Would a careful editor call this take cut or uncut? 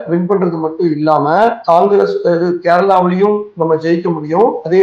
uncut